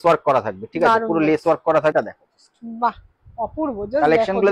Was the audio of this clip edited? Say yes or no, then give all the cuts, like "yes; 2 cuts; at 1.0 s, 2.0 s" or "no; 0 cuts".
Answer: yes; 1 cut; at 1.9 s